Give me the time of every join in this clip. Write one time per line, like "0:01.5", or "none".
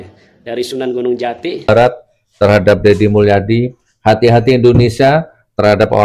0:01.7